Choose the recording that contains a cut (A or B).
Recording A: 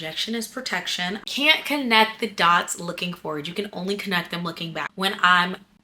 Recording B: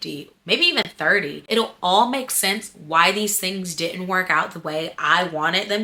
A